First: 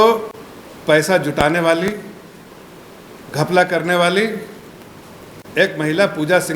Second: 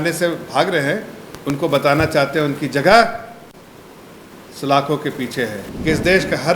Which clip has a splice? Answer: second; 1 cut; at 5.7 s

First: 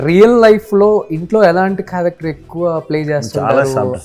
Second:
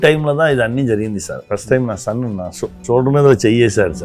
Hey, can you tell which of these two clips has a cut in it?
second; 2 cuts; at 1.4 s, 2.8 s

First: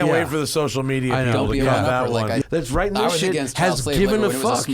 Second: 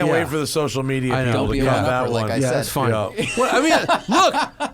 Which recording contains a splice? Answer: first; 1 cut; at 2.4 s

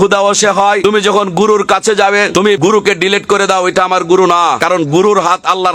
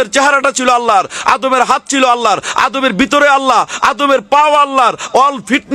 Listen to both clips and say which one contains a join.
first; 3 cuts; at 0.8 s, 2.5 s, 4.6 s

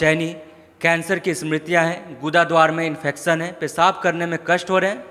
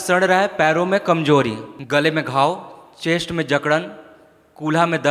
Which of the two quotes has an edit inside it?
second; 1 cut; at 1.7 s

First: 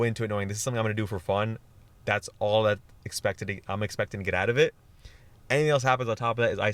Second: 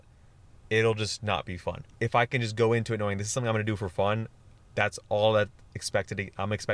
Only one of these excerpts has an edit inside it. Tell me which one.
second; 1 cut; at 1.8 s

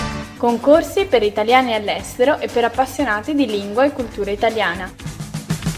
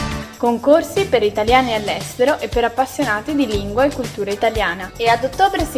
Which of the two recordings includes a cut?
first; 1 cut; at 4.9 s

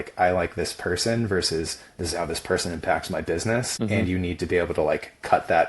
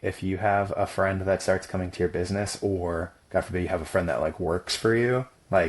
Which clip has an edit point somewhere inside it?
first; 1 cut; at 4.1 s

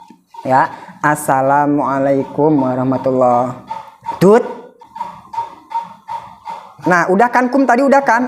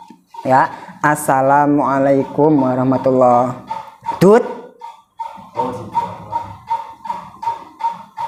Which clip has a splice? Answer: first; 1 cut; at 4.8 s

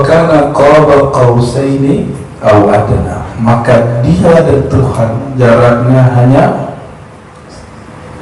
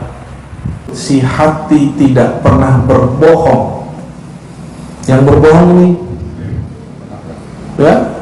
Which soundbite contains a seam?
second; 1 cut; at 0.9 s

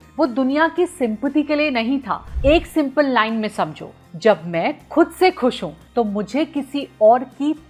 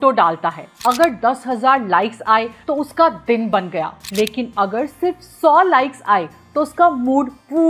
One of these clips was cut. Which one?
first; 1 cut; at 2.2 s

